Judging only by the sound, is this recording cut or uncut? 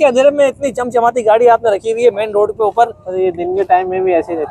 uncut